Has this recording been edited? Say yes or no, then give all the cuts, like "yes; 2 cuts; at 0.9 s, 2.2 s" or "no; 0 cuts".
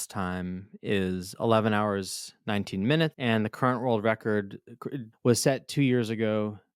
yes; 1 cut; at 3.2 s